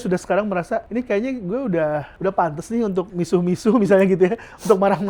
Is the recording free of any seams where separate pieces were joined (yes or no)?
no